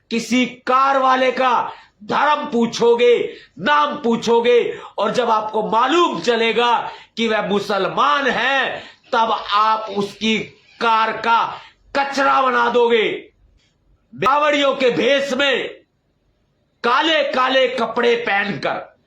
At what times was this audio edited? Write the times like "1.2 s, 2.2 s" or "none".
14.3 s